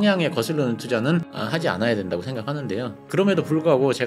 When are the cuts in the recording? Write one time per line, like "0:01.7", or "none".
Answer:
0:01.4
0:03.0